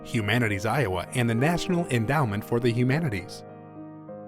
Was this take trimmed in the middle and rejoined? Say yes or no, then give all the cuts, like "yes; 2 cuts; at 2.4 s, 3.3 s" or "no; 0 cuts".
yes; 1 cut; at 3.2 s